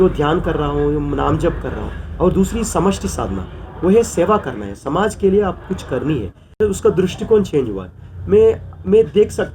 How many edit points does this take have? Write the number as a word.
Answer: one